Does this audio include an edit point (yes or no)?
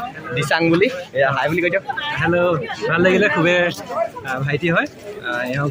no